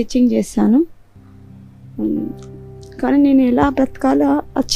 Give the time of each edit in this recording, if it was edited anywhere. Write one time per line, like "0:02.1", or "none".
none